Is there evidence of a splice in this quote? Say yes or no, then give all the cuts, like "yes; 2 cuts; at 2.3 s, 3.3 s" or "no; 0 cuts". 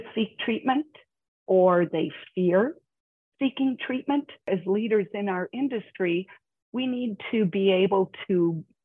yes; 1 cut; at 4.5 s